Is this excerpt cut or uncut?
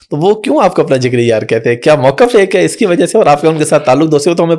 uncut